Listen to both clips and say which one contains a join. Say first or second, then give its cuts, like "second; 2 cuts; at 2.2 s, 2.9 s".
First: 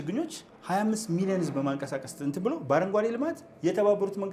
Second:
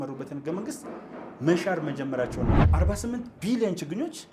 second; 1 cut; at 2.7 s